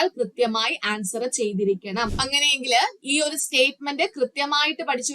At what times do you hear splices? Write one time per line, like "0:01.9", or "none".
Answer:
0:02.2